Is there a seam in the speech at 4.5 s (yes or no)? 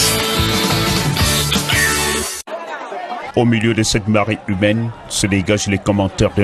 no